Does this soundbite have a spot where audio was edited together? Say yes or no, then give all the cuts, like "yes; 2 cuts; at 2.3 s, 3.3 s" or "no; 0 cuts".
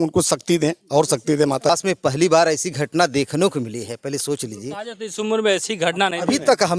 yes; 1 cut; at 1.7 s